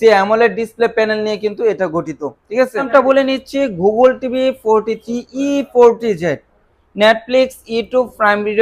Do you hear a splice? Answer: yes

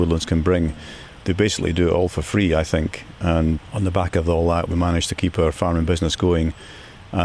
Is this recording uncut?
no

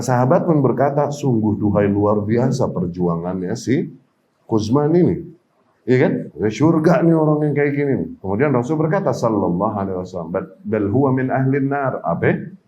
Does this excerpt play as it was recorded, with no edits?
no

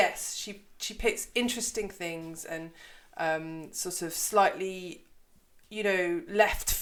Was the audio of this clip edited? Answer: no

